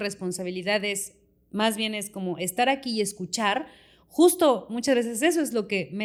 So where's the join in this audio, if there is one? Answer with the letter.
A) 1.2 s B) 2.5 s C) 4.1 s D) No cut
D